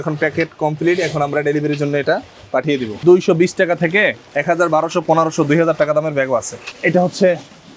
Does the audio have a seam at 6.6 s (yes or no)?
yes